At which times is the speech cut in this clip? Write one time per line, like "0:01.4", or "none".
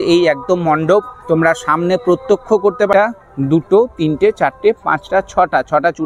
0:02.9